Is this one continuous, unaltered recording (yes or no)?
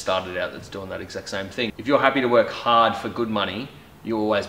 no